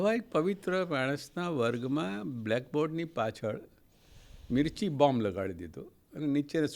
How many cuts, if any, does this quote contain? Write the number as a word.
zero